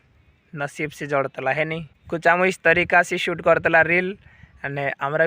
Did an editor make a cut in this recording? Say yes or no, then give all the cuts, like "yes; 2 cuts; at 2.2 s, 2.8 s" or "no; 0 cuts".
yes; 1 cut; at 1.9 s